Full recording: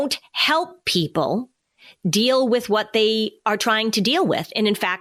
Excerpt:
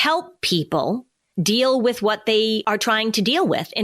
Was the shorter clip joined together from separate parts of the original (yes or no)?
yes